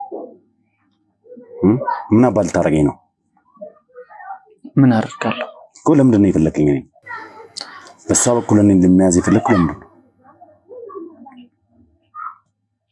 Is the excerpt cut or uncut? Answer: uncut